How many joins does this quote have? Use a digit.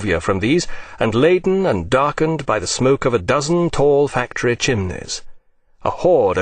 1